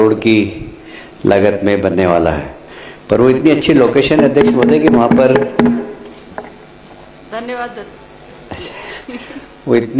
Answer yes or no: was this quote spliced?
no